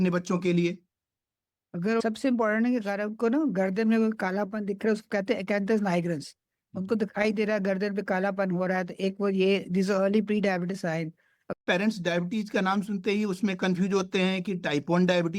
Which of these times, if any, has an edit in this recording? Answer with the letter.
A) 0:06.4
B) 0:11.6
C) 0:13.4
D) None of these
B